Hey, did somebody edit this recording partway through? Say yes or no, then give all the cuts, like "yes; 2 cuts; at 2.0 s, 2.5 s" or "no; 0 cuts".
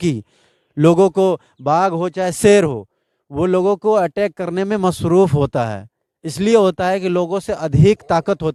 no; 0 cuts